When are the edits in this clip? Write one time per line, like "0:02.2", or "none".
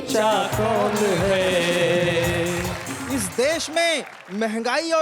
0:02.9